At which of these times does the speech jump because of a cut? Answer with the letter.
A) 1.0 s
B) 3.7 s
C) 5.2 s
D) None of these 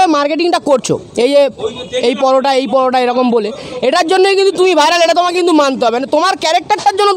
D